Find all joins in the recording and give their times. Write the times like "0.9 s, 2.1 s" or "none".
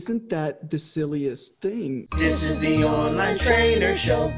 2.1 s

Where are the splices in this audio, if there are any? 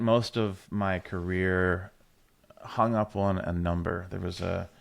none

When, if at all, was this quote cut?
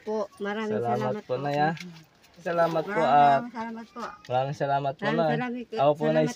2.4 s

